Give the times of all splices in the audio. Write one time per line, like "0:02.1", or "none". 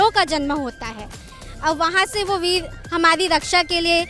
none